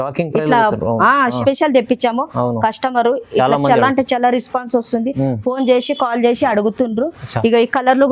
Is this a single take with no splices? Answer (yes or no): no